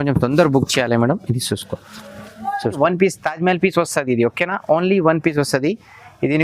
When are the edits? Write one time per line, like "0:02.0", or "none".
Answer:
0:02.8